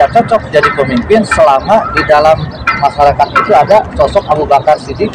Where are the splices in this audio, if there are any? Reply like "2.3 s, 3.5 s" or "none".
none